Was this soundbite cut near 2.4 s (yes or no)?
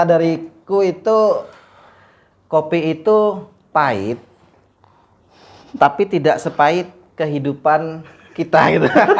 no